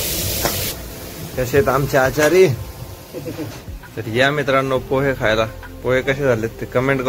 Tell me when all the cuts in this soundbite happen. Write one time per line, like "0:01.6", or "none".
none